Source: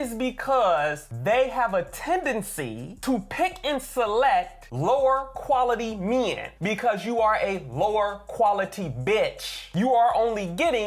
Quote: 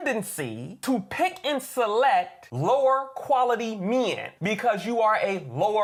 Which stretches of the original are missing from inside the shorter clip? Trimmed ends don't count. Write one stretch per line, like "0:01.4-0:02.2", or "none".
none